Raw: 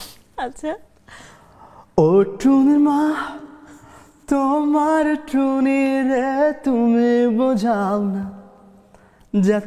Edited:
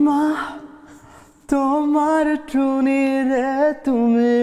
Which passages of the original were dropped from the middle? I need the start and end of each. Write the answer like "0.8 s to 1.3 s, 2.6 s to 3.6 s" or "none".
none